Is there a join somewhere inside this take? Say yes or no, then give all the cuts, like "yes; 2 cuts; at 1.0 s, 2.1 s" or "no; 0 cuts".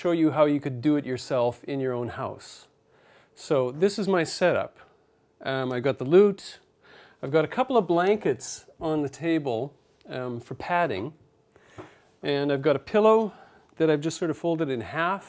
yes; 1 cut; at 4.6 s